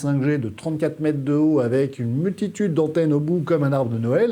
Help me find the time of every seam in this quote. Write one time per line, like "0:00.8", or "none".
none